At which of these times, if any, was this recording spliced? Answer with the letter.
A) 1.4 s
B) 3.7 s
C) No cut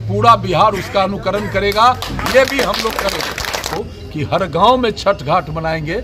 B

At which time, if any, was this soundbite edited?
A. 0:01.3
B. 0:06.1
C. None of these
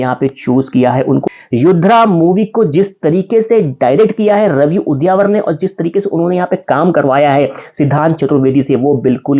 A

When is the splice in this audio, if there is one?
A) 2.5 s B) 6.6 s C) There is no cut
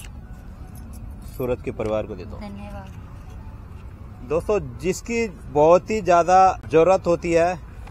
B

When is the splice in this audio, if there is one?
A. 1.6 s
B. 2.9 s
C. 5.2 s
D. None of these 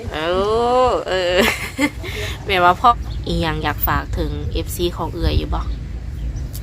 B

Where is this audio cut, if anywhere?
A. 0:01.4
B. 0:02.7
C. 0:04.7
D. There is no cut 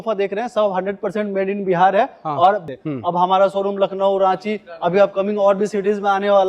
B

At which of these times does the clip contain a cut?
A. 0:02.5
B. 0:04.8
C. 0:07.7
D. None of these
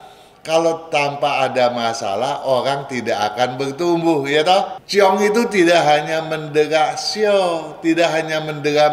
B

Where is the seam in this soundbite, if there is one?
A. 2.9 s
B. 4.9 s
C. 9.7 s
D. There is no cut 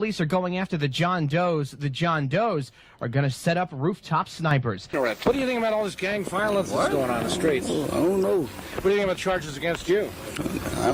B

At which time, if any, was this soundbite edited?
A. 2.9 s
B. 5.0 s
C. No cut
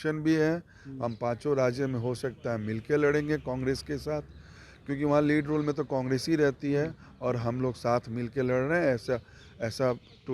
C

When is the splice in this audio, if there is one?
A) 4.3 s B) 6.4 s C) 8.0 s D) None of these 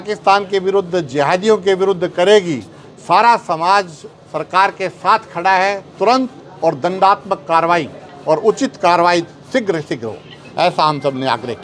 D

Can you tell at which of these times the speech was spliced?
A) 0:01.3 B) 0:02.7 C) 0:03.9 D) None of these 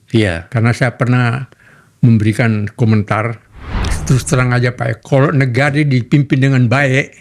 C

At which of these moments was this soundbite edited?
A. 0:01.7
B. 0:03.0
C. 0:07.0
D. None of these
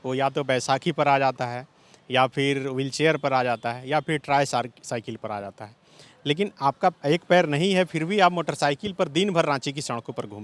C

